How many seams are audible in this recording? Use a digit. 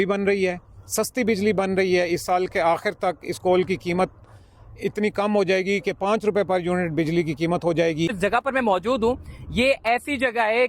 1